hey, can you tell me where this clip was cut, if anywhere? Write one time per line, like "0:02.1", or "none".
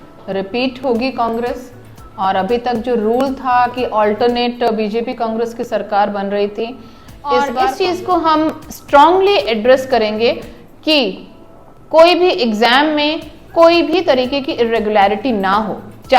0:07.5